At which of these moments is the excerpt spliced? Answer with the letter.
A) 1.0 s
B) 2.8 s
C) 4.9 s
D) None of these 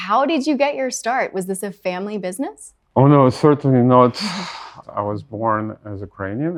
D